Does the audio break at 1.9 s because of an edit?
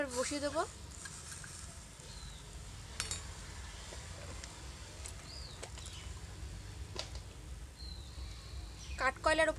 no; 0 cuts

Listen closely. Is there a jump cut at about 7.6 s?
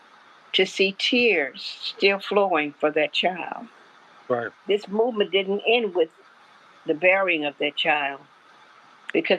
no; 1 cut; at 4.5 s

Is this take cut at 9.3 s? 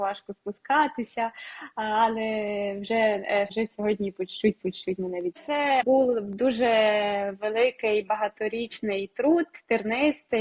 no; 2 cuts; at 3.5 s, 5.5 s

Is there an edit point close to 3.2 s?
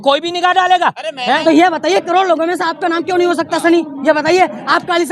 no; 1 cut; at 1.4 s

